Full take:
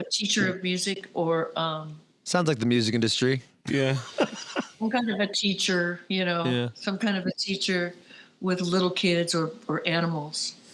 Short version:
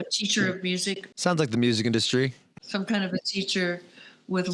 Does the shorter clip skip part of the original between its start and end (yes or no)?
yes